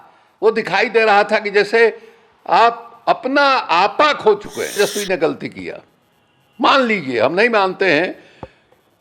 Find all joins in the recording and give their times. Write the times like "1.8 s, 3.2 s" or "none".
4.8 s